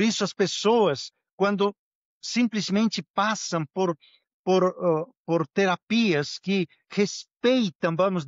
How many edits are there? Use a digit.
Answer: 0